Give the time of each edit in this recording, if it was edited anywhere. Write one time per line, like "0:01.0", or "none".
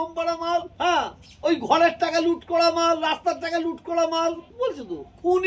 0:00.9
0:04.5